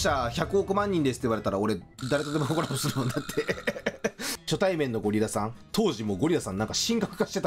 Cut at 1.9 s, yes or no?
no